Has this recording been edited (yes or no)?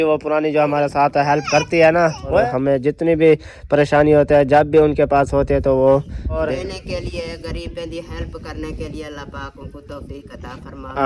yes